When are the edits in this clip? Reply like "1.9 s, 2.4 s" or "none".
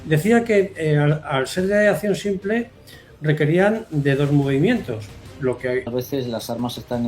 5.9 s